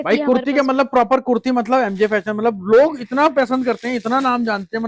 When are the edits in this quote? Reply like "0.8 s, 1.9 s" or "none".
none